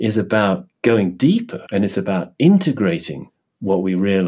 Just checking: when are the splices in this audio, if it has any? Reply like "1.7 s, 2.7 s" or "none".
1.6 s

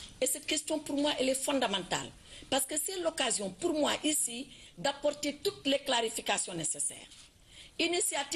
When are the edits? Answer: 1.4 s

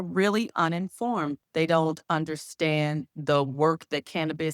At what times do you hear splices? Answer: 1.4 s

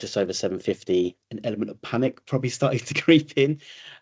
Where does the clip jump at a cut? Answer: 1.2 s

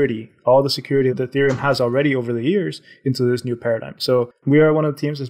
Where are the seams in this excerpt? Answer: 4.4 s

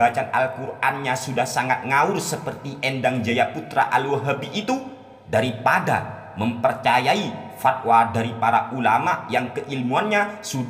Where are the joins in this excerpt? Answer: none

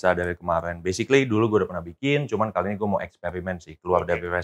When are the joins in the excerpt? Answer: none

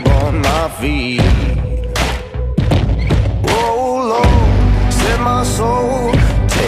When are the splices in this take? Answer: none

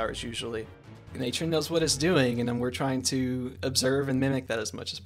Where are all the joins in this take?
1.0 s

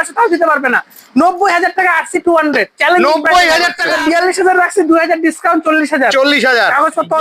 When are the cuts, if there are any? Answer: 3.8 s

